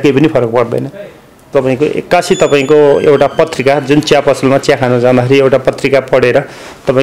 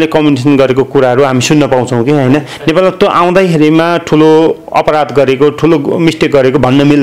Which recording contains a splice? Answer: first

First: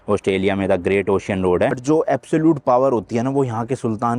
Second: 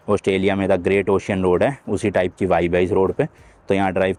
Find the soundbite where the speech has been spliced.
first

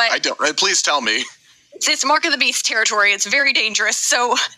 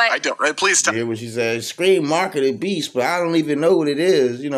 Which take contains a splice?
first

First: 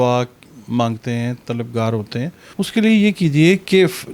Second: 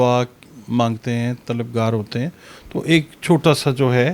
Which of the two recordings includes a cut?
first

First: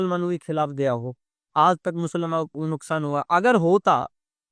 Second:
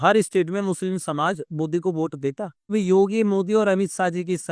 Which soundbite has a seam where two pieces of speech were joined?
second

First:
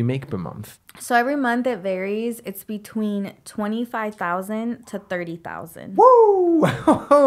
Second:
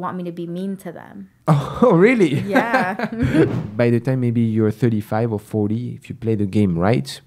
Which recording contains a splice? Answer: second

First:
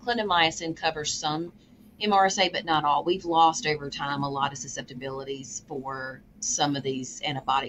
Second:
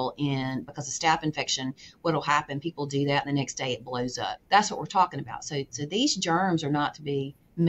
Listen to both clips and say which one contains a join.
second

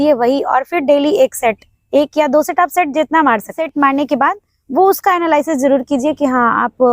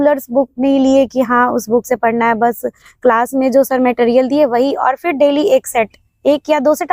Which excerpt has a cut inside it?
first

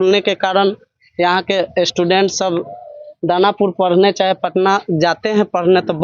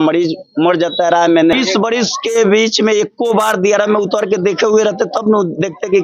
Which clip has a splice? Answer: second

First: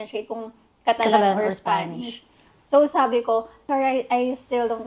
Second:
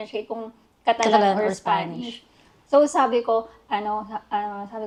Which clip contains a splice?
first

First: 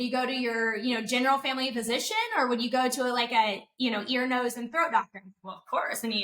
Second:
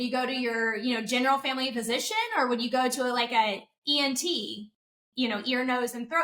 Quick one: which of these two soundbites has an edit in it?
first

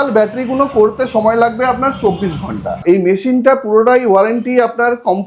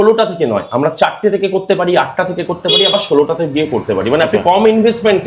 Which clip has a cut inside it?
first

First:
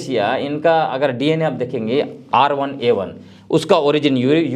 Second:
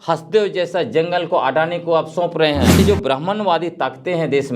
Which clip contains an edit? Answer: second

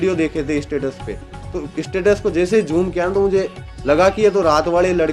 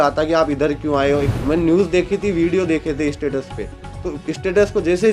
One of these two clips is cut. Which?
second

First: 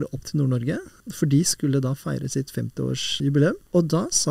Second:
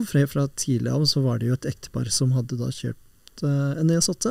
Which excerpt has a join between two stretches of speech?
first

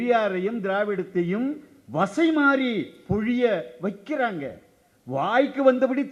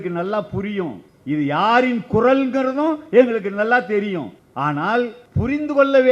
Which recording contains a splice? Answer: second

